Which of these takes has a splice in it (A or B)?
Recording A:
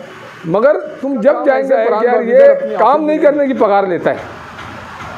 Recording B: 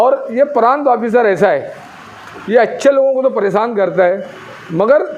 A